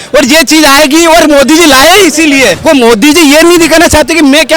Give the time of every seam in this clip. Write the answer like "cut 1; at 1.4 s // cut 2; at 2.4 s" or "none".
cut 1; at 2.6 s